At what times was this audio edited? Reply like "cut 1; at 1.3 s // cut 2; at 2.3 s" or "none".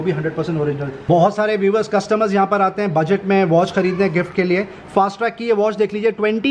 cut 1; at 0.9 s